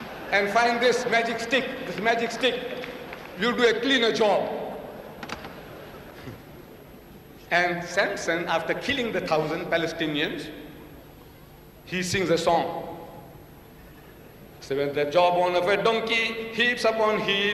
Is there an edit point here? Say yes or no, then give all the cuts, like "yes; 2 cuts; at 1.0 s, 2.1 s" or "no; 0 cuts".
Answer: no; 0 cuts